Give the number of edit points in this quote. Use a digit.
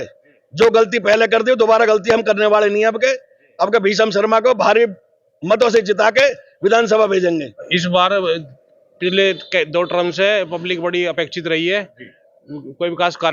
1